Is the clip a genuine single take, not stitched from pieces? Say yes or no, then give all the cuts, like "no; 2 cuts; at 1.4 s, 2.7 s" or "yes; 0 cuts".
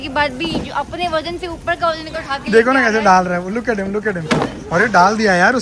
yes; 0 cuts